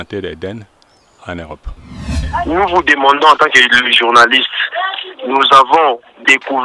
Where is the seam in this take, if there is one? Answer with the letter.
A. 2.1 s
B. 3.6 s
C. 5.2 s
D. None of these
A